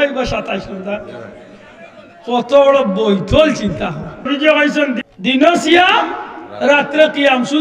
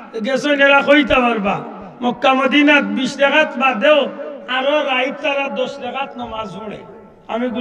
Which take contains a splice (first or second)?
first